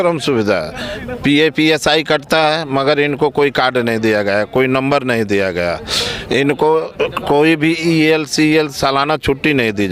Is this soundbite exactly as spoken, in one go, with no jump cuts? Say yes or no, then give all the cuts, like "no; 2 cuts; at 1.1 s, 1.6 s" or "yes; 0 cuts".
yes; 0 cuts